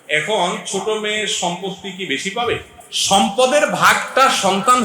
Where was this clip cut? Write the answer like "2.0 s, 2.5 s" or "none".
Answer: none